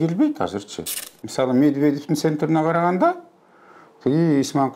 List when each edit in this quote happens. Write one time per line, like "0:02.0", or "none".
0:01.0